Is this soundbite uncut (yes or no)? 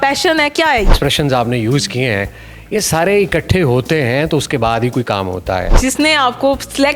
no